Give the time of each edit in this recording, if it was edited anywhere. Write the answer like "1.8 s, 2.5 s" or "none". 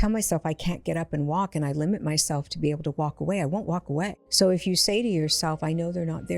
4.2 s